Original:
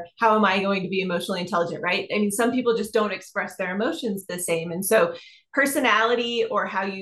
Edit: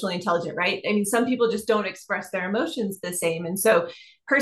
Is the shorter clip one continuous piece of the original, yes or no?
yes